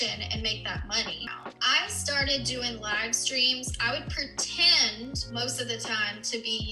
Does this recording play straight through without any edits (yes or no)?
no